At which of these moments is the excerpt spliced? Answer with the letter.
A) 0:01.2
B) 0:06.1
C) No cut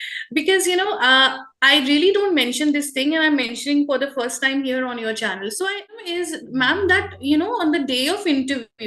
B